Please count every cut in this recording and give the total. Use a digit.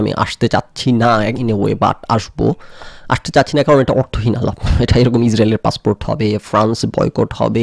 0